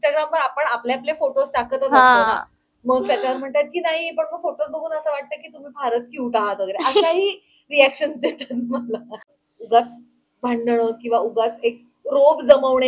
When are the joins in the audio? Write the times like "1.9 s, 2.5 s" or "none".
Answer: 9.3 s